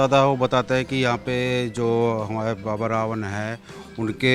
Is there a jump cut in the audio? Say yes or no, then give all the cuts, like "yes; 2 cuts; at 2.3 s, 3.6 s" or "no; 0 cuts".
no; 0 cuts